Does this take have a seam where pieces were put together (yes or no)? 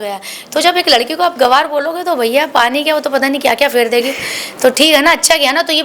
no